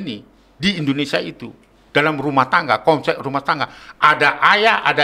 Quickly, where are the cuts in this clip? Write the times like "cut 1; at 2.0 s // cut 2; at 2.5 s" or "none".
none